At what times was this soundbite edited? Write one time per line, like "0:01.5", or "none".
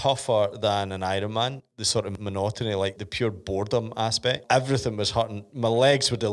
0:01.8
0:03.0
0:04.4